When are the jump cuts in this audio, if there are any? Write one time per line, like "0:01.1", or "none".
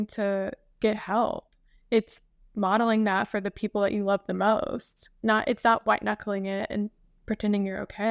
none